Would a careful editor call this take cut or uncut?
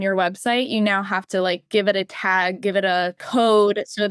cut